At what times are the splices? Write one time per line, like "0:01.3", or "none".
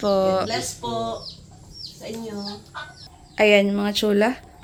none